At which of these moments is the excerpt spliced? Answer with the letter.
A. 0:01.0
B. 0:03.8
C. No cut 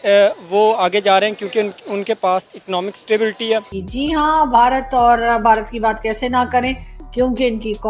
B